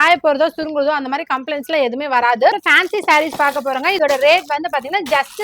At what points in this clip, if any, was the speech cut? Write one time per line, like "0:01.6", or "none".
0:02.5
0:04.0